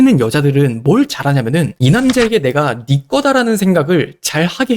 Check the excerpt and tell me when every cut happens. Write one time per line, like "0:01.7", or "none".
none